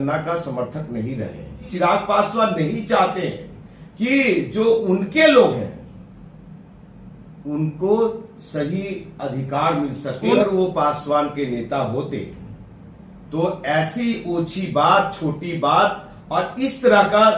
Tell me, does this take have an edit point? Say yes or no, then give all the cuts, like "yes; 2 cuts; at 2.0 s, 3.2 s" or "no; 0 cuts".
yes; 2 cuts; at 1.6 s, 10.4 s